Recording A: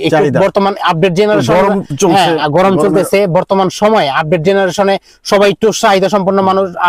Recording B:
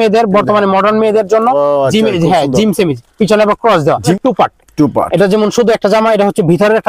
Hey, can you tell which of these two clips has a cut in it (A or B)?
B